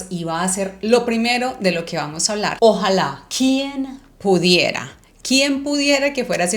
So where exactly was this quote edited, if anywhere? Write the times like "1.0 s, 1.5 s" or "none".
2.5 s